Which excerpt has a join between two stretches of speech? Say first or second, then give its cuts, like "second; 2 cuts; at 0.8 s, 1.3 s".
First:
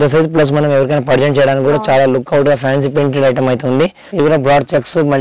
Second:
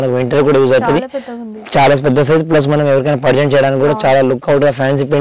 first; 1 cut; at 4.0 s